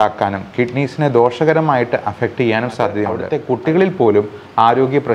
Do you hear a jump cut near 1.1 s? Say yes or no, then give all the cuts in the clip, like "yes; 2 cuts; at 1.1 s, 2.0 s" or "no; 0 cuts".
no; 1 cut; at 3.3 s